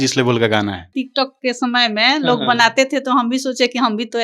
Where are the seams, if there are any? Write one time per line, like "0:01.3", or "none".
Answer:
0:00.9